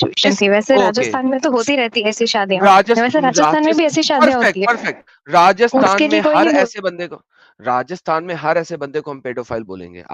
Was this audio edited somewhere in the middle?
no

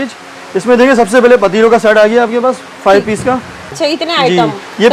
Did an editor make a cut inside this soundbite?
yes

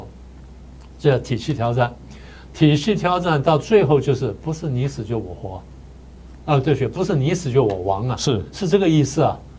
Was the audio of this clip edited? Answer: no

